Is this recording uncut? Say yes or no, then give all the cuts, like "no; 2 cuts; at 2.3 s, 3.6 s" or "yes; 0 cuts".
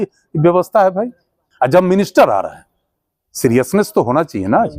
no; 1 cut; at 1.4 s